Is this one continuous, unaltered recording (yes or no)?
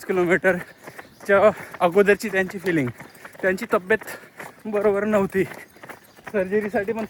yes